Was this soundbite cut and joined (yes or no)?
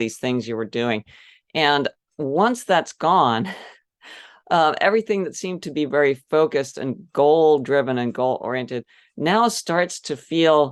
no